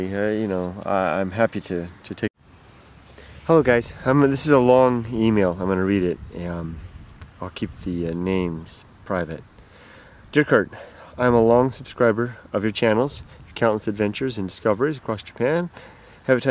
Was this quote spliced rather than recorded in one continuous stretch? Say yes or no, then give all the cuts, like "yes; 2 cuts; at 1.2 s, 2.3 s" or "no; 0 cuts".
no; 0 cuts